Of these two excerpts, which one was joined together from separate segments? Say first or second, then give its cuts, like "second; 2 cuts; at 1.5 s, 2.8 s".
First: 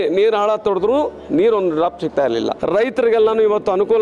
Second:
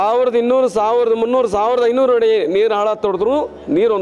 first; 1 cut; at 2.6 s